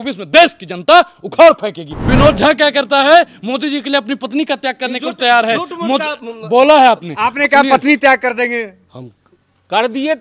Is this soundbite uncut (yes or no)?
no